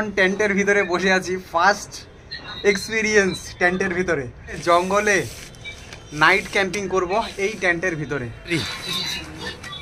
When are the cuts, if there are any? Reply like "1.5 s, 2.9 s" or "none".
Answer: 4.6 s, 8.5 s